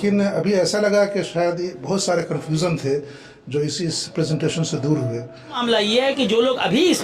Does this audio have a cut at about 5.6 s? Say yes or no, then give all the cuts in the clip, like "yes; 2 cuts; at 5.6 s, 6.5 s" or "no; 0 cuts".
yes; 1 cut; at 5.6 s